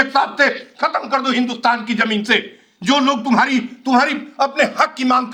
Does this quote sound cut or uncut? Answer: uncut